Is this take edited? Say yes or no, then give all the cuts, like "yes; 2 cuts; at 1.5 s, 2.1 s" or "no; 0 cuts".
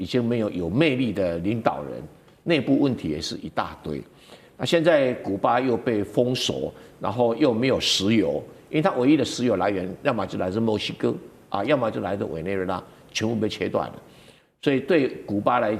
no; 0 cuts